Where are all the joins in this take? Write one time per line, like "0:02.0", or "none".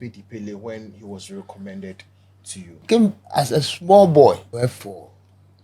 0:02.8
0:04.5